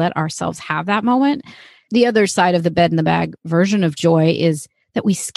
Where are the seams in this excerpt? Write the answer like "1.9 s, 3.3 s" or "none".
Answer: 1.8 s